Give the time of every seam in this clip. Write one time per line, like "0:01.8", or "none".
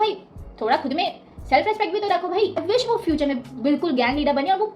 0:02.6